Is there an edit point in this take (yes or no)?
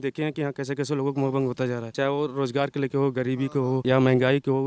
yes